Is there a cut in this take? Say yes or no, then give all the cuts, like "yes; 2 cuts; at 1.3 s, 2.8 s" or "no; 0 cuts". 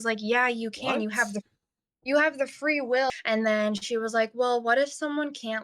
yes; 1 cut; at 3.1 s